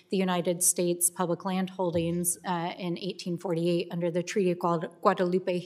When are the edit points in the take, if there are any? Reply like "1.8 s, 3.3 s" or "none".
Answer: 1.5 s